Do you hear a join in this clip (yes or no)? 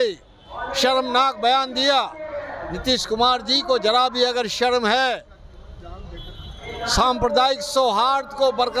no